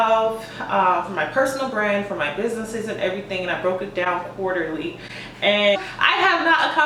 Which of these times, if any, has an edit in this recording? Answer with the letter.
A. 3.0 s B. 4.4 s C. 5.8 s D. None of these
C